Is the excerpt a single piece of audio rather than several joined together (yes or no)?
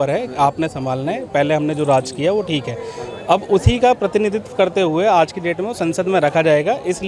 yes